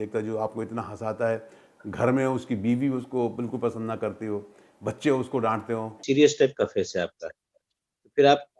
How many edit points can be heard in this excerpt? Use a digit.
1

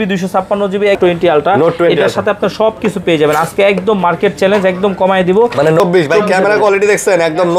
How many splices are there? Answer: 2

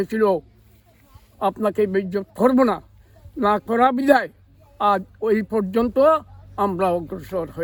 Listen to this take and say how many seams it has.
0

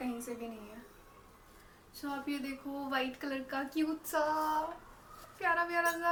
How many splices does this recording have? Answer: 0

